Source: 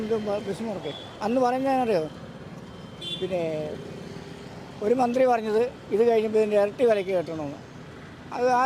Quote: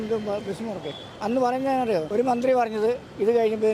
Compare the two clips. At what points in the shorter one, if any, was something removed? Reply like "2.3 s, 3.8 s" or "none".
2.1 s